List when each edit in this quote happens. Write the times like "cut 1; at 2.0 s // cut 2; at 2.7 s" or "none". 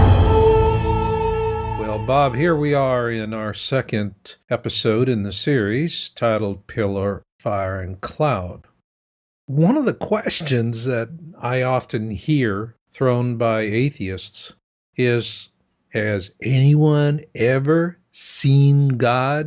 cut 1; at 1.6 s